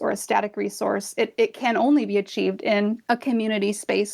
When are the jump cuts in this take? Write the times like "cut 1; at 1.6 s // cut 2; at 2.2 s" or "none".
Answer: cut 1; at 3.0 s